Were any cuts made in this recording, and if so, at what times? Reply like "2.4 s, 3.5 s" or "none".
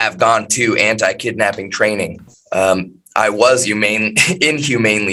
none